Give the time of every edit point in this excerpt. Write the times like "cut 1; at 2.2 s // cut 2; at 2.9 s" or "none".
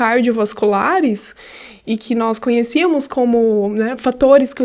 none